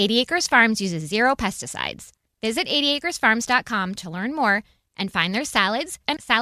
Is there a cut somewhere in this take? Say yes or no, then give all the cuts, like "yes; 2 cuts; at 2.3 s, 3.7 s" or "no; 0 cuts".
no; 0 cuts